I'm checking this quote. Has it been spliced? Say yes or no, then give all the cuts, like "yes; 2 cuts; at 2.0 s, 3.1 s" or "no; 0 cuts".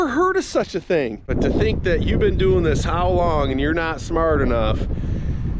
yes; 1 cut; at 1.3 s